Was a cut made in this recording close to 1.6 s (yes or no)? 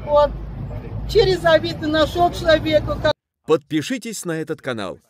no